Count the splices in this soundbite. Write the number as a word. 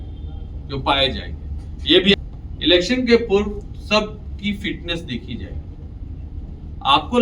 one